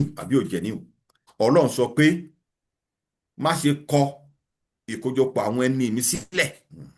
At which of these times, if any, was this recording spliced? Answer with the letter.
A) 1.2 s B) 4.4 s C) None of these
A